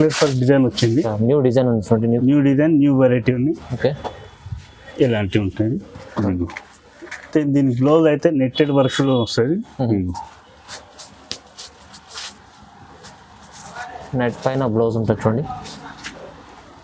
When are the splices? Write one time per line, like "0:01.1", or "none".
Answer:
none